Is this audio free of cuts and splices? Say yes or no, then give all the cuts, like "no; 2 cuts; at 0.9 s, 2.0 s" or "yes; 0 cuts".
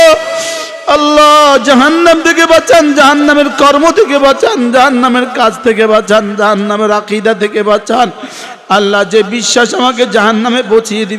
yes; 0 cuts